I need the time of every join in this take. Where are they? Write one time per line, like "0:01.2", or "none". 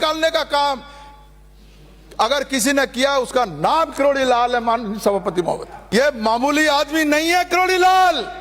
0:05.7